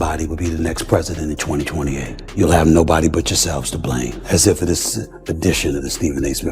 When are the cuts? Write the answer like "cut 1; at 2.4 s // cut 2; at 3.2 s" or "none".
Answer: cut 1; at 2.2 s // cut 2; at 4.2 s